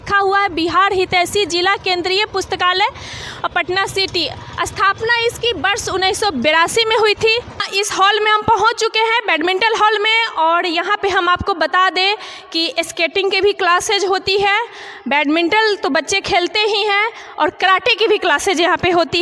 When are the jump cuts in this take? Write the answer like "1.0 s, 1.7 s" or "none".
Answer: 7.7 s